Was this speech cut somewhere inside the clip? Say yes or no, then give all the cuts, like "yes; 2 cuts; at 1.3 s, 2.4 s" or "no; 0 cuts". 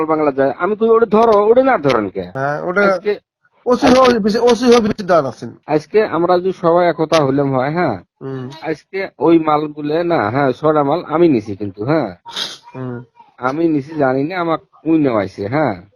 no; 0 cuts